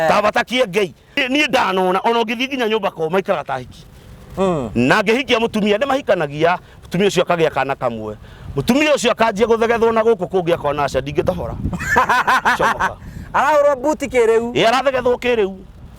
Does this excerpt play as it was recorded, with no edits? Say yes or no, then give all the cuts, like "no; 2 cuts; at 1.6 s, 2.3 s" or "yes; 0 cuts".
no; 1 cut; at 1.2 s